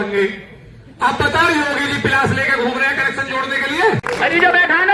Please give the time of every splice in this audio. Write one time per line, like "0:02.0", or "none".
0:04.0